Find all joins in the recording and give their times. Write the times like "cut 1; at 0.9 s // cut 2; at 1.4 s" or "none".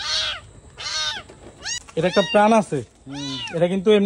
cut 1; at 1.8 s